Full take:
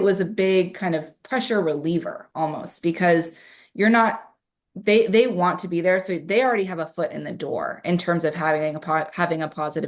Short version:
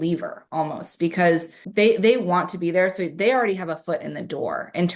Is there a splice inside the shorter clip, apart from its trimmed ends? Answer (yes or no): yes